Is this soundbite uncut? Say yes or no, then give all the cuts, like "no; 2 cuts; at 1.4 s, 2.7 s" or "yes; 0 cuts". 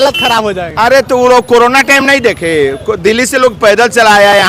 yes; 0 cuts